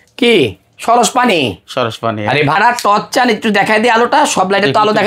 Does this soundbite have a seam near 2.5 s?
yes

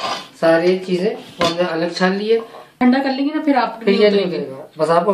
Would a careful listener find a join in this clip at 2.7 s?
yes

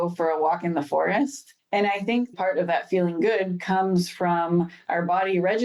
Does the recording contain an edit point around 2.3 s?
yes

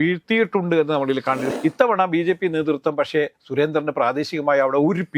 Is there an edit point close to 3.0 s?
no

